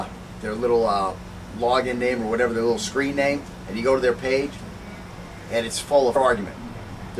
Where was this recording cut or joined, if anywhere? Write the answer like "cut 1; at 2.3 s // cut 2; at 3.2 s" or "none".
none

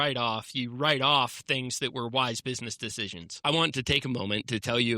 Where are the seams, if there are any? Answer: cut 1; at 3.4 s

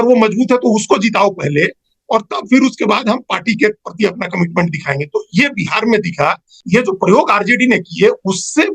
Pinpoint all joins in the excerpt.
cut 1; at 6.6 s

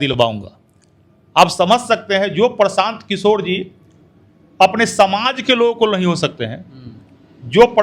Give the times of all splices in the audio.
none

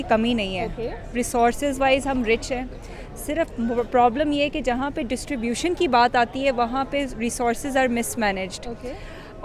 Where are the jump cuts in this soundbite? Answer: none

